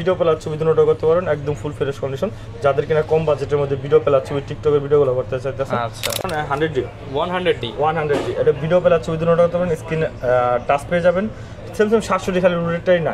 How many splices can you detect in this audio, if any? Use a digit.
1